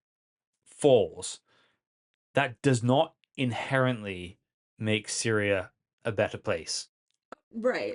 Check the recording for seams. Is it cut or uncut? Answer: uncut